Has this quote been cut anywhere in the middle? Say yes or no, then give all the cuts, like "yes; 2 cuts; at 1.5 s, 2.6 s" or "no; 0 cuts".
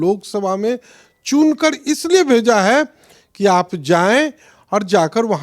no; 0 cuts